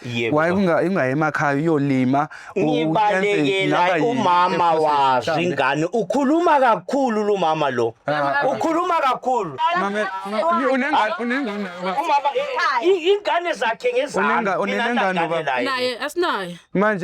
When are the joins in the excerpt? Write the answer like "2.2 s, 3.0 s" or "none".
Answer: 9.5 s